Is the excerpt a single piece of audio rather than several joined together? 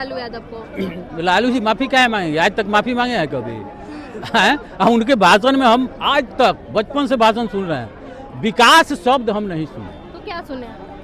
yes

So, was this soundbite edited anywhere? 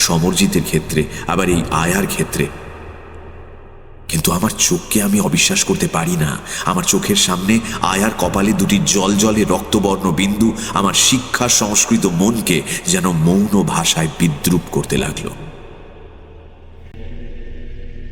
no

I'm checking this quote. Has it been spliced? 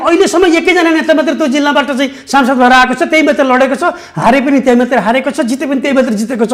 no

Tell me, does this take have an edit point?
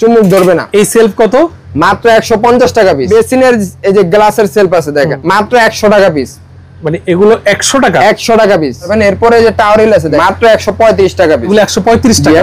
yes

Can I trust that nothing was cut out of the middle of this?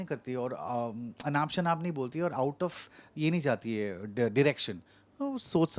yes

